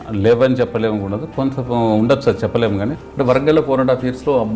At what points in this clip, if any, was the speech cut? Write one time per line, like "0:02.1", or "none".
0:03.0